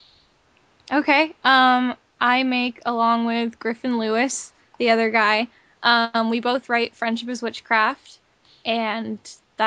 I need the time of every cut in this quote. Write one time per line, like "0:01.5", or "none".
none

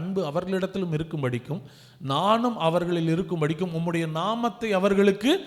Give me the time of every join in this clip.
none

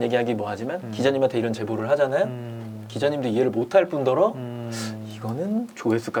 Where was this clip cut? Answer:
none

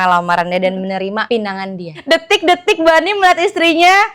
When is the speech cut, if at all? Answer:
0:01.9

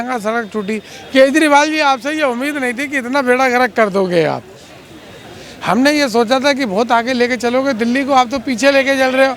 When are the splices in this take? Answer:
none

